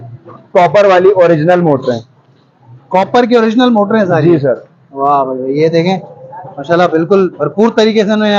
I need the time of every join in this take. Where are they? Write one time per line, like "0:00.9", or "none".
none